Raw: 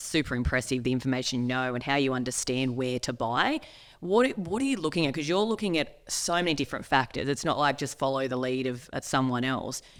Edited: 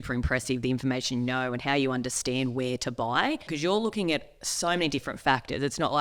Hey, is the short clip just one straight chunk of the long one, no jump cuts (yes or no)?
no